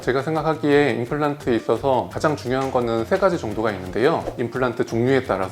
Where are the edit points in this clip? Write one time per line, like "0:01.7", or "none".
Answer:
0:04.3